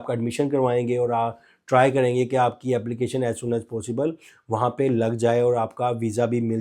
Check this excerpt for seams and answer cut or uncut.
uncut